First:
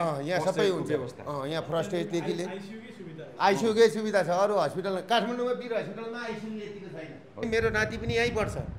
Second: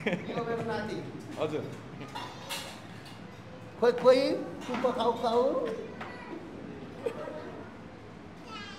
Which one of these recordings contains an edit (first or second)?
first